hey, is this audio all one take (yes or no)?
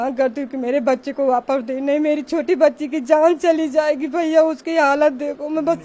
yes